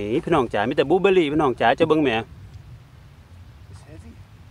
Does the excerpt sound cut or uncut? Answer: uncut